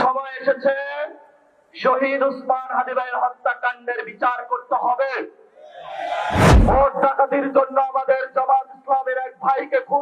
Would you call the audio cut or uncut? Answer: cut